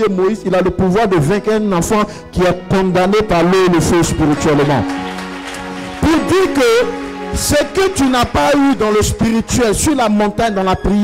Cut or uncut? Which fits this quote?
uncut